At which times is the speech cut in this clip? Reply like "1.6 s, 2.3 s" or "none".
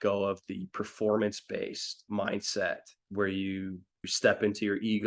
2.0 s, 3.0 s, 4.1 s